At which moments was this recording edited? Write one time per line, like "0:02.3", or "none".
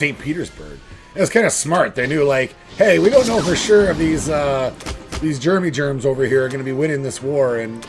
none